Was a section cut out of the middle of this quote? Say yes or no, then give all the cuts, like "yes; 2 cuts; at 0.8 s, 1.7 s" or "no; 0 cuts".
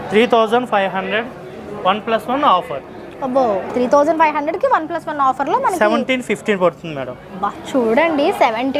no; 0 cuts